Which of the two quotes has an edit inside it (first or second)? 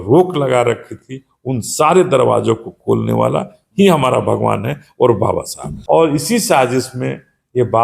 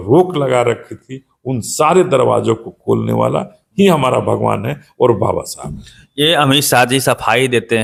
first